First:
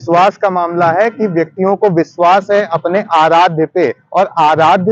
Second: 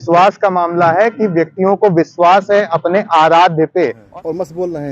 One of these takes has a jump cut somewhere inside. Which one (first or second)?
second